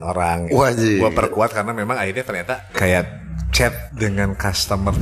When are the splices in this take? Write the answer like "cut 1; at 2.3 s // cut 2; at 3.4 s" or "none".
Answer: cut 1; at 2.7 s // cut 2; at 3.8 s